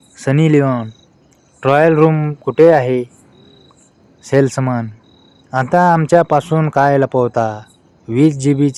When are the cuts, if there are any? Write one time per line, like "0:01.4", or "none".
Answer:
none